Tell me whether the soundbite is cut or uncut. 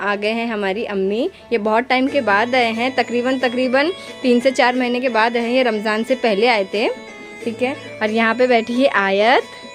uncut